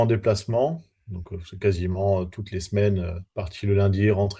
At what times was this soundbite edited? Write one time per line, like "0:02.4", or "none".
none